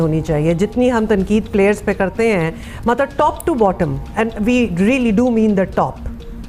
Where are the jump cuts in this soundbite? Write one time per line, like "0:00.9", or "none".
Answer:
none